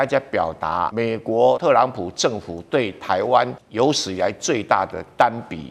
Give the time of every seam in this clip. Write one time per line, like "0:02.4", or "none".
0:01.4
0:03.6